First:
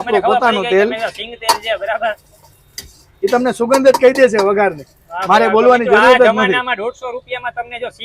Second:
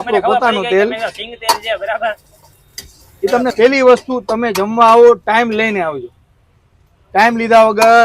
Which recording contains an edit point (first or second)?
second